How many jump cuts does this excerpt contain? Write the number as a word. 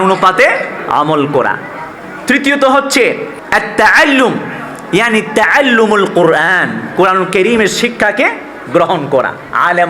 one